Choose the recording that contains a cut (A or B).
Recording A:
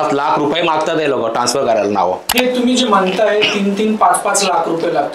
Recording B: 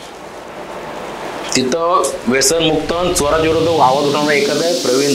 A